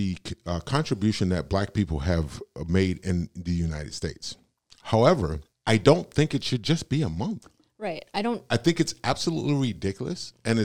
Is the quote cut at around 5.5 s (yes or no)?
yes